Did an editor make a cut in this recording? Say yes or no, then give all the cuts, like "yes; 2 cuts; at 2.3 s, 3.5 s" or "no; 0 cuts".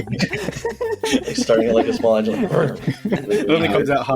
yes; 2 cuts; at 1.1 s, 2.9 s